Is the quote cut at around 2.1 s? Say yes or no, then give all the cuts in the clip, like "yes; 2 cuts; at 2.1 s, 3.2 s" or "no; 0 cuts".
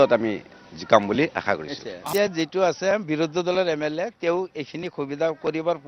yes; 1 cut; at 2.1 s